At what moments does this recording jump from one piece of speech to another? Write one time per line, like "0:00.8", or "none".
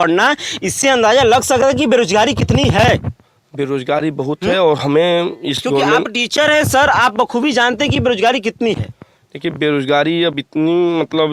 none